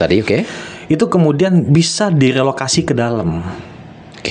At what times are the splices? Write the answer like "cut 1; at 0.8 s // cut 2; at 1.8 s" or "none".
none